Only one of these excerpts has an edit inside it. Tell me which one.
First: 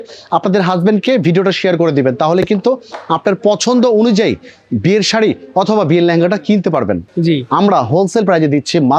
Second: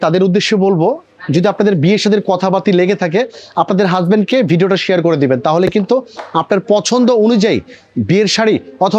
first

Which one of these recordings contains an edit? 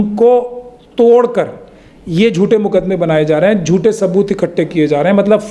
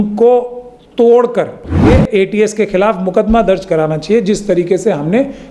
second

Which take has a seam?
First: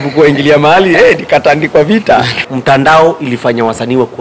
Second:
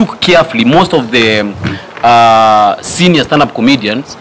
first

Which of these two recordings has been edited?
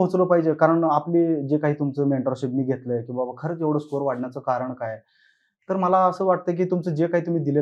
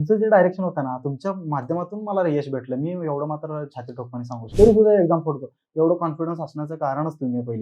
second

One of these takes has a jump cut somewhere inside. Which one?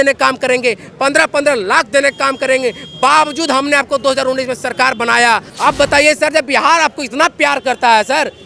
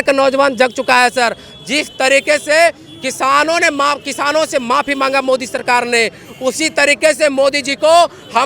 first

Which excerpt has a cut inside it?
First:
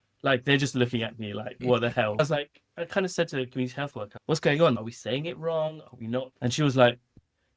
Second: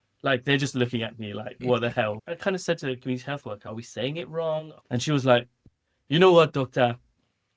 second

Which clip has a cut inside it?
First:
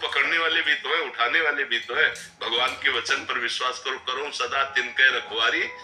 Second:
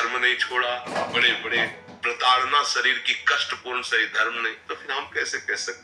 second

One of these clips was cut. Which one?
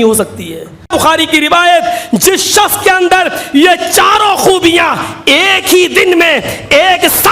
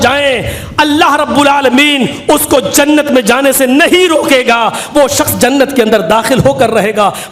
first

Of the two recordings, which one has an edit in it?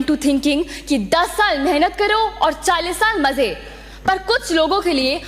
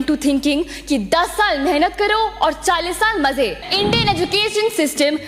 second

